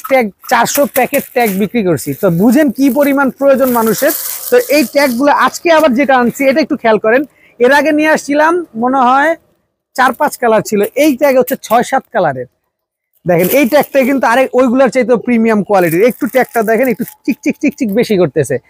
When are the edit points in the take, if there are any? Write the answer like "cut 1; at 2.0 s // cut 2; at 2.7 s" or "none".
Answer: none